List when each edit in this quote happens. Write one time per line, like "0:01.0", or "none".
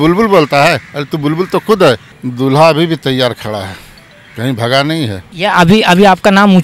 0:02.1
0:05.2